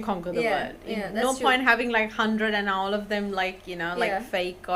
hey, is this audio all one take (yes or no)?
yes